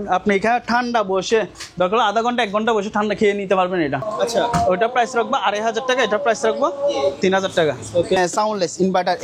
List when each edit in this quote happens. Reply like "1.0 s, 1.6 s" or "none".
4.1 s, 8.2 s